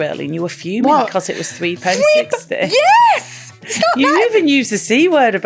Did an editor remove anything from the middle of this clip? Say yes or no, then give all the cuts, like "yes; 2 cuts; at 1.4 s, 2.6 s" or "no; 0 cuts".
no; 0 cuts